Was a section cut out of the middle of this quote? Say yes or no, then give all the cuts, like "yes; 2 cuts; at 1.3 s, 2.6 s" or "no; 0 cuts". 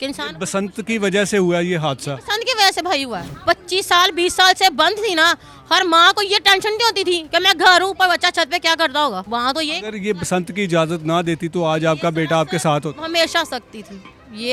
no; 0 cuts